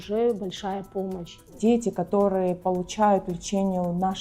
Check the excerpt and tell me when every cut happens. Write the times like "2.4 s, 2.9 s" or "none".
1.5 s